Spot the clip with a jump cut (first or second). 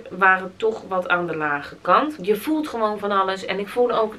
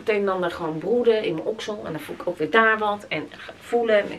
first